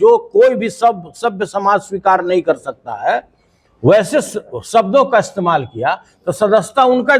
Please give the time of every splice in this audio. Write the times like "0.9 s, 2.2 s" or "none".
none